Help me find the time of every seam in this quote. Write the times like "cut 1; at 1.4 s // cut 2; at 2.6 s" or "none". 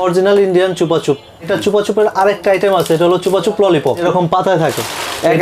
cut 1; at 1.5 s // cut 2; at 4.0 s